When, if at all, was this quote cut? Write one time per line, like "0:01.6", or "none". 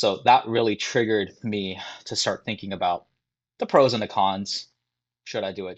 none